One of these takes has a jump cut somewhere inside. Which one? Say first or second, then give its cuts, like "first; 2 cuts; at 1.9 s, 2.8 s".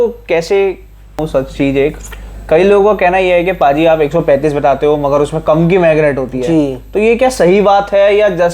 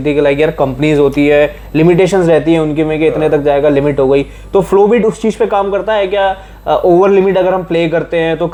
first; 1 cut; at 1.2 s